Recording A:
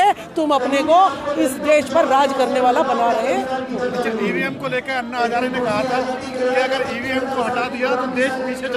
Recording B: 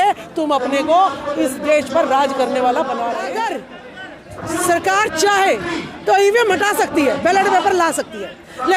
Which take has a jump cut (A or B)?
B